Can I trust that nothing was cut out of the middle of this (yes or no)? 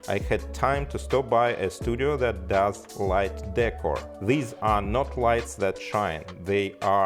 yes